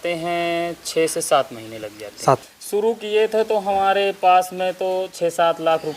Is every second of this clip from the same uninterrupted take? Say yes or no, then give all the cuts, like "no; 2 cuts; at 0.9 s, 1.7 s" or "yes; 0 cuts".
no; 1 cut; at 2.5 s